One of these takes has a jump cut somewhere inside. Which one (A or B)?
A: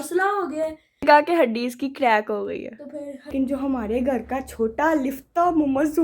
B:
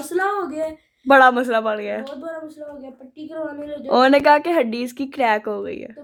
A